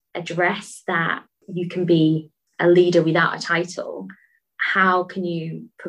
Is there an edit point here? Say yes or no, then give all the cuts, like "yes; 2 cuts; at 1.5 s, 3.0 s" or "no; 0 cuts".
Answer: yes; 1 cut; at 1.4 s